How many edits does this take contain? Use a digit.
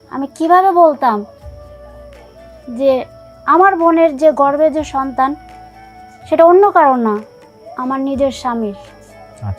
2